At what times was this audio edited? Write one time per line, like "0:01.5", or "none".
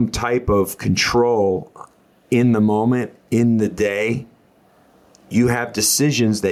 none